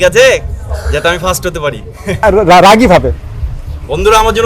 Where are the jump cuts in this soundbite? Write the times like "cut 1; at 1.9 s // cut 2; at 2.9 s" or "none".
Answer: cut 1; at 2.2 s